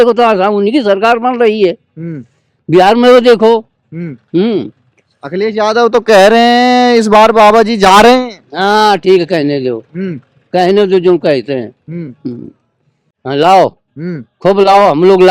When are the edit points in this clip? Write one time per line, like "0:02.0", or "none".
0:13.1